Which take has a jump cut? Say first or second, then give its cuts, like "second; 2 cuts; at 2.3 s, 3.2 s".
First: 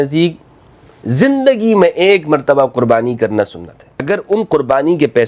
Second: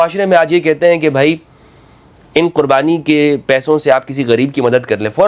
first; 1 cut; at 4.0 s